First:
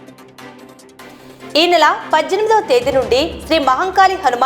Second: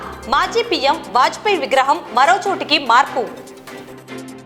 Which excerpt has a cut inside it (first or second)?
first